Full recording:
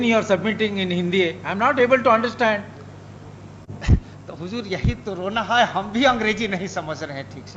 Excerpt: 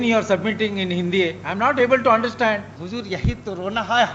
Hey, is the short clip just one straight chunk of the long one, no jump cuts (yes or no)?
no